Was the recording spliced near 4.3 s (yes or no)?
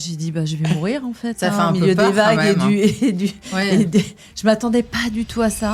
no